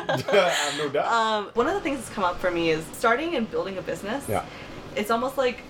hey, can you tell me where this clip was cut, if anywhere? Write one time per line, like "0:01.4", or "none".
0:01.5
0:02.9